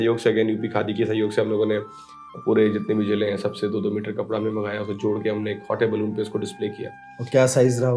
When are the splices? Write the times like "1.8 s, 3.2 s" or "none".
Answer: none